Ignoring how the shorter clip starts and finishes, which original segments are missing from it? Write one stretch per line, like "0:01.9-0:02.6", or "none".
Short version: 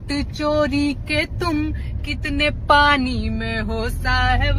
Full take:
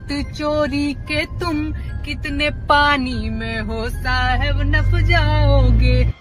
none